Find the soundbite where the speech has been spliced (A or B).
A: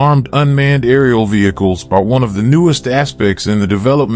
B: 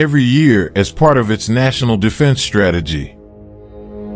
B